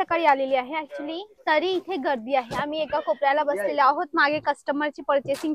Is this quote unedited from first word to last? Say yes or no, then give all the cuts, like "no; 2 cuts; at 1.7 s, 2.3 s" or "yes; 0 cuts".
yes; 0 cuts